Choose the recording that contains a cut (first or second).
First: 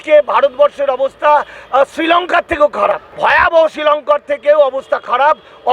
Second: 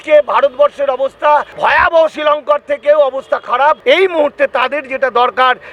second